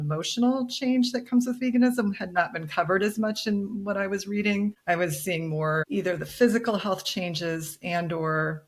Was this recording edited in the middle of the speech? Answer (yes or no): yes